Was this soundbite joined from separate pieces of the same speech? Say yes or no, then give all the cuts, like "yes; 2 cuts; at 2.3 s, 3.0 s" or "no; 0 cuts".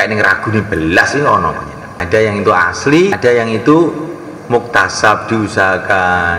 yes; 2 cuts; at 2.0 s, 3.2 s